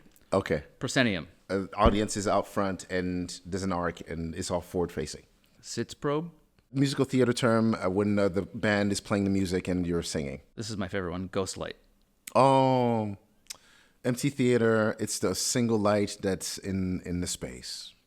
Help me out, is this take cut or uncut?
cut